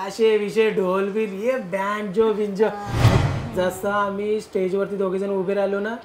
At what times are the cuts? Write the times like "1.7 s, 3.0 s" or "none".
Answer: 3.2 s